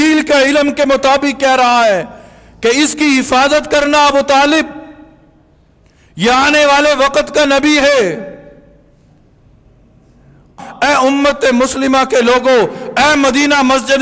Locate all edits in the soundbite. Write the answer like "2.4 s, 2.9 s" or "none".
10.5 s